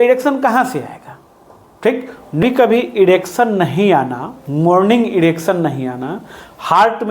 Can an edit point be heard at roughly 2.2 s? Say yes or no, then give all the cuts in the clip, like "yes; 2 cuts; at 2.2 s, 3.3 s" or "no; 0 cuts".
yes; 1 cut; at 2.2 s